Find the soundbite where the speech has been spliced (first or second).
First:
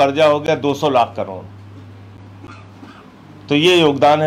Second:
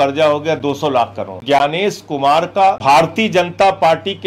second